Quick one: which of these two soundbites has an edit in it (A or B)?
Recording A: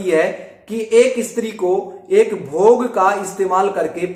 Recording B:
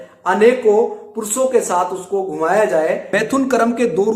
B